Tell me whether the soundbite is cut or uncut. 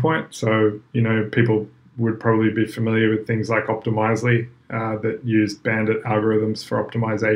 uncut